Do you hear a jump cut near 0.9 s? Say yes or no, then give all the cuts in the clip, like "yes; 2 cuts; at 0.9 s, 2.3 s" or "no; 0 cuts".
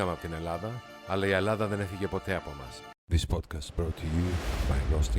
no; 1 cut; at 2.9 s